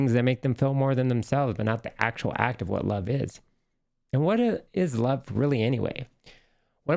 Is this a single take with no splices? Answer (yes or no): no